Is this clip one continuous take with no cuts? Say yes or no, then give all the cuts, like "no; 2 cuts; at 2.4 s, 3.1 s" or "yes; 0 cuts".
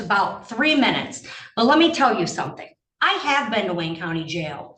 yes; 0 cuts